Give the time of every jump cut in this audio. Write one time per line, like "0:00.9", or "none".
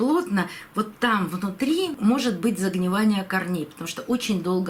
none

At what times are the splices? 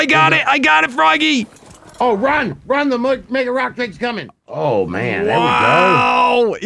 0:04.3

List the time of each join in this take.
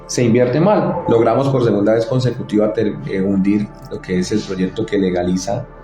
0:01.0

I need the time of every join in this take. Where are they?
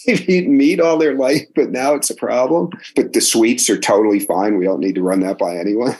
0:02.8

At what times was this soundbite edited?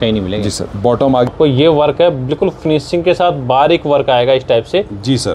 0:01.3

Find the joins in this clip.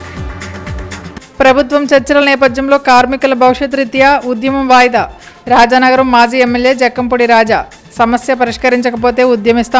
0:00.9

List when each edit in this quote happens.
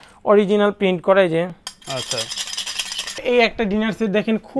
0:03.2

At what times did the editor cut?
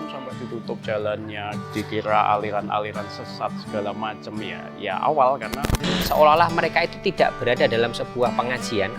0:01.6
0:06.0

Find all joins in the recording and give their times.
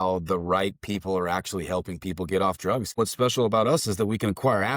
0:02.9

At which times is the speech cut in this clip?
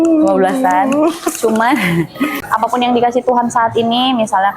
0:02.4

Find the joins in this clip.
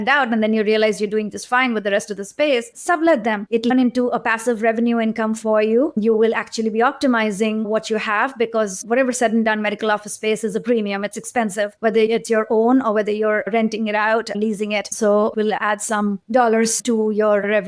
0:15.3

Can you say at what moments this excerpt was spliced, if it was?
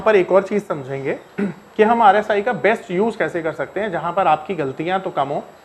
none

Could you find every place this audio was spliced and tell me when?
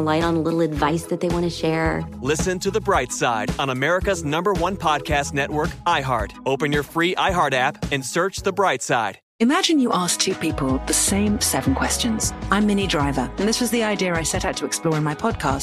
0:09.2

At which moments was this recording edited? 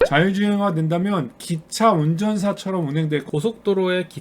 0:03.2

